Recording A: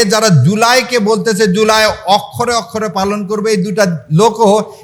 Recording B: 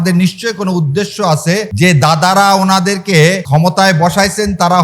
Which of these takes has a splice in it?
B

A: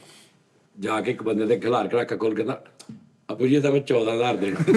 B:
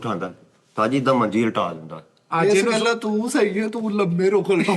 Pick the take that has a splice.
B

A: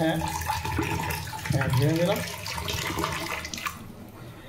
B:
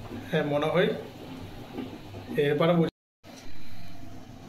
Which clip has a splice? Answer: B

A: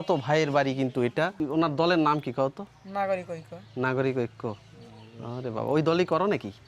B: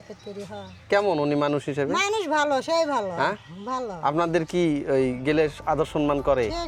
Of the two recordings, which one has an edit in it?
A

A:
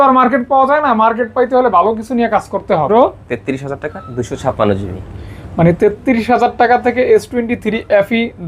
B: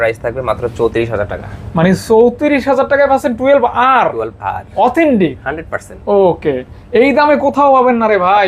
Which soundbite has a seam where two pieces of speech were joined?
A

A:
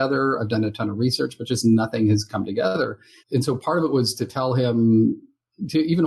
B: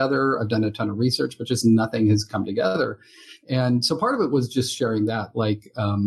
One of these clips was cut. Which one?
A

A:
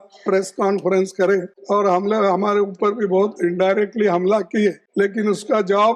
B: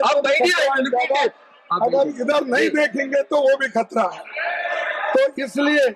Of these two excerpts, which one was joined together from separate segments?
A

